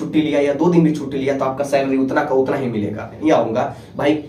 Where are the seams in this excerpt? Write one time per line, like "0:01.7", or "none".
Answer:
0:03.2

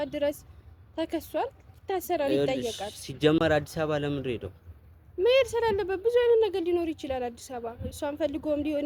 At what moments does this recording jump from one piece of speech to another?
none

